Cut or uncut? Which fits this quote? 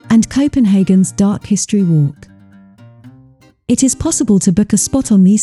uncut